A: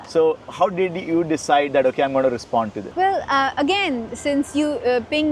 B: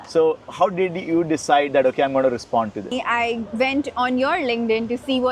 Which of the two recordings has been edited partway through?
B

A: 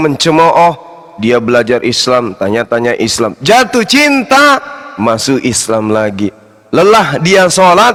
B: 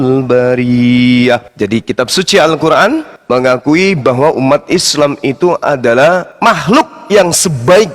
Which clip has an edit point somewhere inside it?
B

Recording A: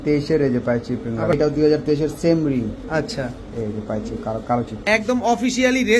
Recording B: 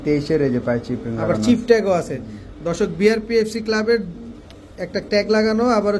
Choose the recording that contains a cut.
A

